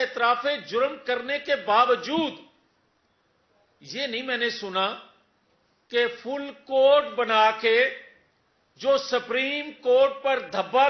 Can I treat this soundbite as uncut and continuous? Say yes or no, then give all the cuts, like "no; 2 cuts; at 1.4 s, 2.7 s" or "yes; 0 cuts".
yes; 0 cuts